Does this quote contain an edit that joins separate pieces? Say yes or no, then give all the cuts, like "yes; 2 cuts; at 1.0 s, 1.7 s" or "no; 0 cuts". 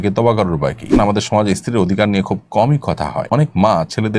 yes; 2 cuts; at 0.9 s, 3.2 s